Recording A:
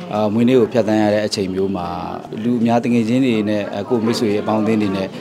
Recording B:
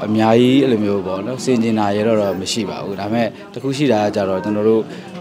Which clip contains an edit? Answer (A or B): A